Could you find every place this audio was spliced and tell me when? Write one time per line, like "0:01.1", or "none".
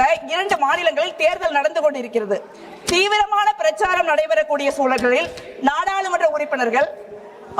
none